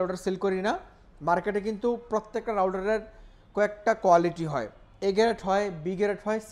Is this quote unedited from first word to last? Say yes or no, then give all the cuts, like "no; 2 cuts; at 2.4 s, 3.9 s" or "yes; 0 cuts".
yes; 0 cuts